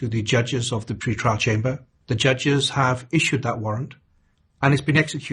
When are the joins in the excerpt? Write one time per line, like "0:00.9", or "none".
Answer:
0:01.9